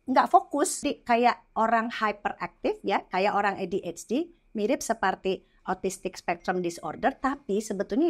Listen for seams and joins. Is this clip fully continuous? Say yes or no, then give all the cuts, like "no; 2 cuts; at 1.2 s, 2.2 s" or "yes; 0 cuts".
no; 1 cut; at 0.9 s